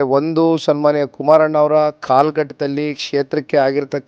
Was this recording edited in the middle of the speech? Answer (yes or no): no